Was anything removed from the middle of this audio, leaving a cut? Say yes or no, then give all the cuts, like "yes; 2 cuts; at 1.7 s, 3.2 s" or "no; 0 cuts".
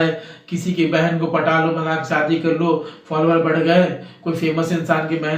no; 0 cuts